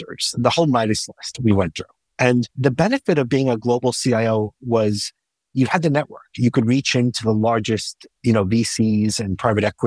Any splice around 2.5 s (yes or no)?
yes